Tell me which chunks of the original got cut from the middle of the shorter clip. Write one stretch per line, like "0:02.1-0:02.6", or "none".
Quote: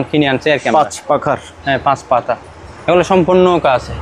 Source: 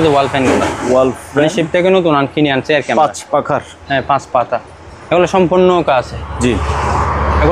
none